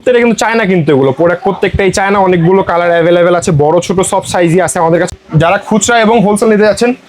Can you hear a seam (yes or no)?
yes